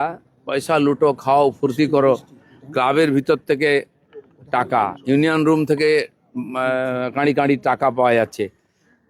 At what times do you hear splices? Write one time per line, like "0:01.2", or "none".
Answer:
none